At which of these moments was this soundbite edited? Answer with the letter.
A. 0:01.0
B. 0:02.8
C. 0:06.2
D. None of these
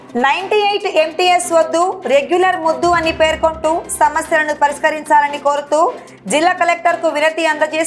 D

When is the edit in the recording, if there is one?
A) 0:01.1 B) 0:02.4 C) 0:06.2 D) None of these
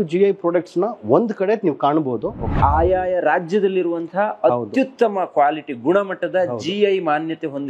B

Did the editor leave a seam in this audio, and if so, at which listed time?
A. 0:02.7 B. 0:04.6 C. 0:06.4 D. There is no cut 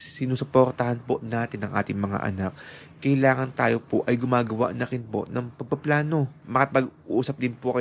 C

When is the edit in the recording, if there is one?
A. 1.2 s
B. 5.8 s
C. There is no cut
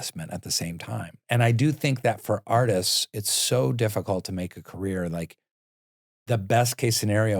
A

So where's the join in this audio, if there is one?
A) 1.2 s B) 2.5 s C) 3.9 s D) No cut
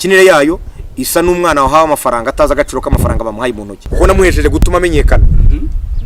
C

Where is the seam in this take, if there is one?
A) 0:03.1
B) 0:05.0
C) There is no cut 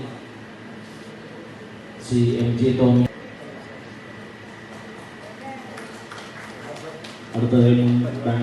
A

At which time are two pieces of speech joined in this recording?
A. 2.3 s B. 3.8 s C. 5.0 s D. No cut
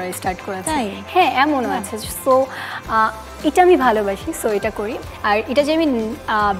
C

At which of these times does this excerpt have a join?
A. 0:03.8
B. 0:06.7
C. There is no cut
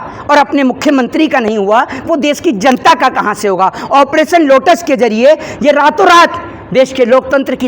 A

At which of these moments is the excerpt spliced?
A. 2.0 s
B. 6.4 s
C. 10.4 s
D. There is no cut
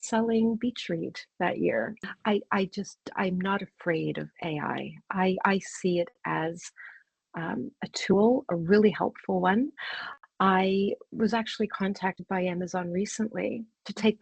A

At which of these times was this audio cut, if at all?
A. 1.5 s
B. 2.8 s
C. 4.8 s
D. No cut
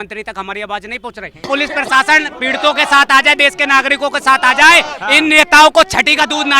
A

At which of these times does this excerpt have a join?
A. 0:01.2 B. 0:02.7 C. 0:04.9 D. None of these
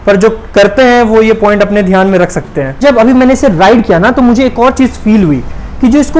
B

